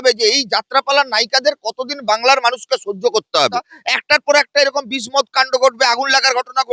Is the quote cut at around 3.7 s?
yes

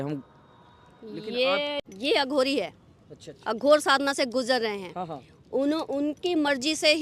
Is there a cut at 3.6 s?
no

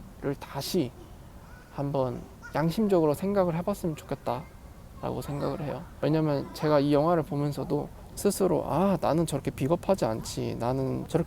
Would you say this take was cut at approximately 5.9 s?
yes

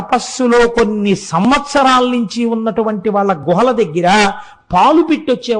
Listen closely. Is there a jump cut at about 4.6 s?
no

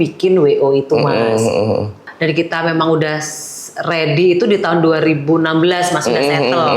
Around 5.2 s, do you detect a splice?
no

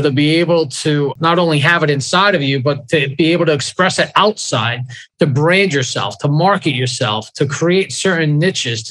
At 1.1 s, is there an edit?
yes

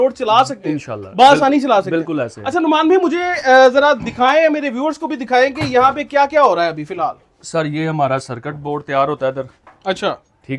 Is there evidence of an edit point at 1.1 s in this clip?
no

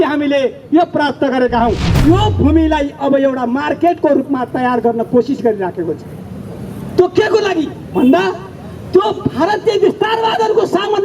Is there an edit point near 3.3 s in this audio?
no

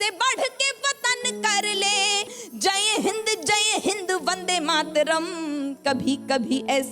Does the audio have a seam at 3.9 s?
no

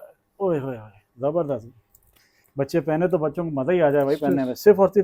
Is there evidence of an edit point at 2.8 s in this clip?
no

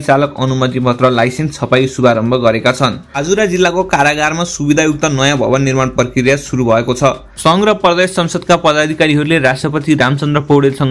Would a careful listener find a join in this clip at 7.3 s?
yes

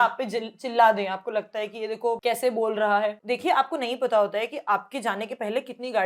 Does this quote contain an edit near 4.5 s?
no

